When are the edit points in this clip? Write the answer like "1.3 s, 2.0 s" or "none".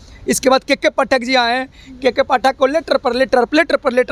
none